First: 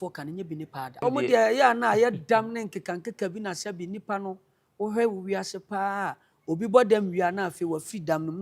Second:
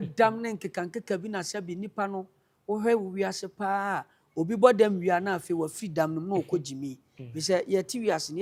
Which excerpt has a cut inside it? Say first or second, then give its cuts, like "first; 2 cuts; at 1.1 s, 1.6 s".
first; 1 cut; at 1.0 s